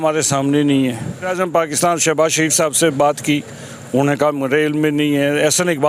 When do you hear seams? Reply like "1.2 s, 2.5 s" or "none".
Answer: 1.3 s